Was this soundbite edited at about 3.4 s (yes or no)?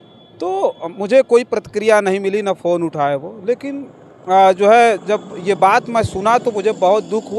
no